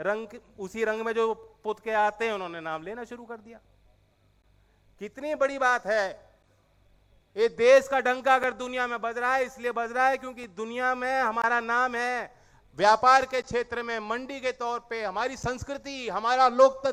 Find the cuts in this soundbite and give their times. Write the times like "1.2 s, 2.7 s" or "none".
none